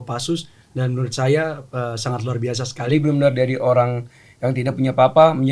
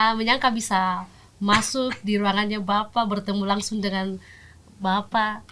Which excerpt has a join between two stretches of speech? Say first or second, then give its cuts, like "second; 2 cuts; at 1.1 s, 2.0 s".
first; 1 cut; at 2.9 s